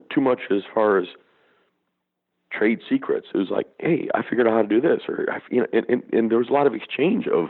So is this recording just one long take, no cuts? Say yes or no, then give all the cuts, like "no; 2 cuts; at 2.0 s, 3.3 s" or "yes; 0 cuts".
yes; 0 cuts